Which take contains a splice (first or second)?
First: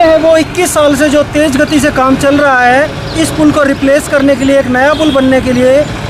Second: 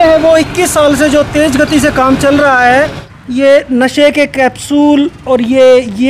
second